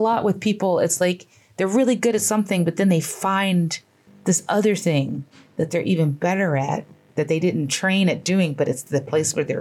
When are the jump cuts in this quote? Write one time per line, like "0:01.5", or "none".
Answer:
none